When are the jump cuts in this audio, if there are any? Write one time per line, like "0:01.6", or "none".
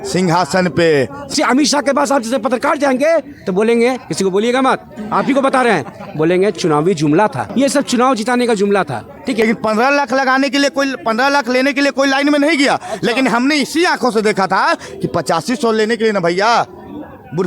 0:01.3
0:09.4